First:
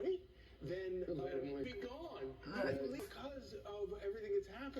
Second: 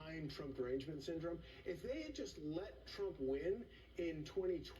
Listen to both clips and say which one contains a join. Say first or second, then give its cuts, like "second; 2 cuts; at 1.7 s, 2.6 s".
first; 2 cuts; at 1.7 s, 3.0 s